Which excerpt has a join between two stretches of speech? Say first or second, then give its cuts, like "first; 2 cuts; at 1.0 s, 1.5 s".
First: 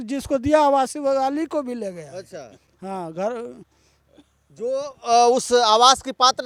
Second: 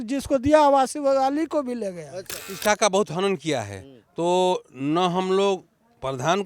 second; 1 cut; at 2.5 s